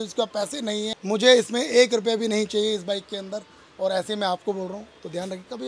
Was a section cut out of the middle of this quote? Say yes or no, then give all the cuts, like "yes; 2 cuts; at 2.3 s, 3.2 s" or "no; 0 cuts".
yes; 1 cut; at 1.0 s